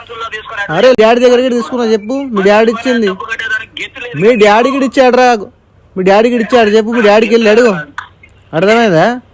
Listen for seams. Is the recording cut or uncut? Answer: cut